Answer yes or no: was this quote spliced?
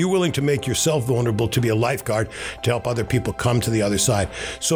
no